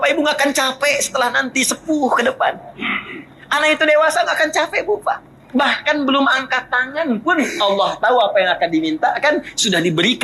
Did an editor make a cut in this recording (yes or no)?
yes